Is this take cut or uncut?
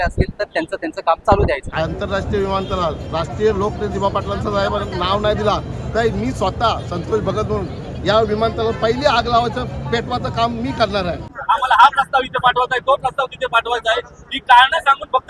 cut